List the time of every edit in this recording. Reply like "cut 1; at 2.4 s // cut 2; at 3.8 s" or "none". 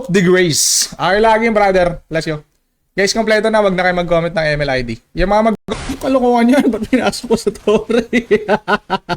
cut 1; at 5.9 s

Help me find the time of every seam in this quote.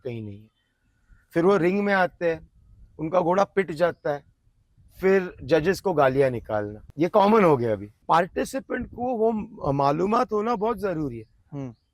cut 1; at 6.8 s // cut 2; at 7.9 s

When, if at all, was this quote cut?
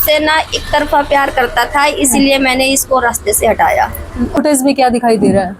cut 1; at 4.4 s

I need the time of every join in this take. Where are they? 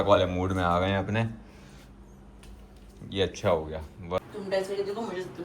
cut 1; at 4.2 s

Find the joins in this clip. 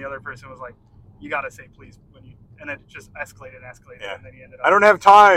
none

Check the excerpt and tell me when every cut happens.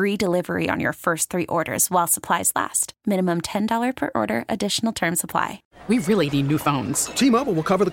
cut 1; at 5.7 s

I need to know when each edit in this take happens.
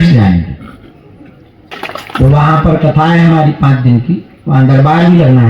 cut 1; at 1.7 s

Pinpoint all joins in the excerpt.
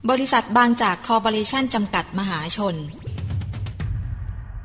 cut 1; at 3.1 s

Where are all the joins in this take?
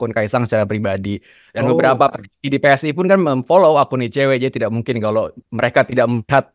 none

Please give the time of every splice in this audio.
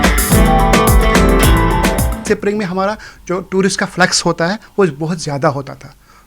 cut 1; at 2.2 s

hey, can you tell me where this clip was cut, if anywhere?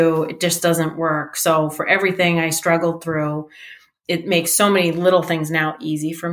none

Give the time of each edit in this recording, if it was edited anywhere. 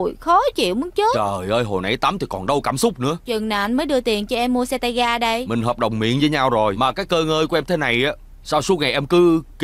cut 1; at 3.2 s // cut 2; at 5.4 s // cut 3; at 6.8 s

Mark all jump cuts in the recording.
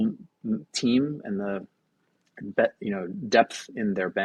none

